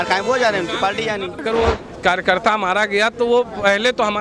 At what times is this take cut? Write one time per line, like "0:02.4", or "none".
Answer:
0:01.4

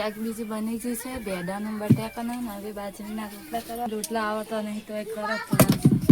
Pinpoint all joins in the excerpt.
0:03.9

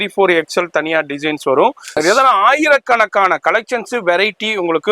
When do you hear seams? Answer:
0:01.8

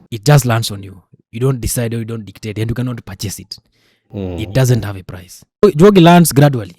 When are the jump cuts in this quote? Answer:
0:05.6

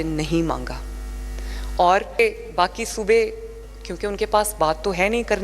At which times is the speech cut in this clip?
0:02.2

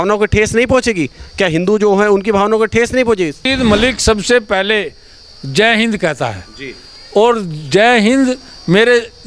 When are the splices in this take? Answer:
0:03.5

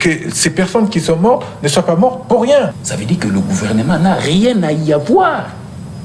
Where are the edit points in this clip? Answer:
0:02.7

